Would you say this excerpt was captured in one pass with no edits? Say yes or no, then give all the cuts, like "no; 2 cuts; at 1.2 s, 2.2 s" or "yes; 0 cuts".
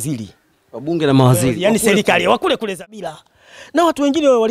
no; 1 cut; at 2.7 s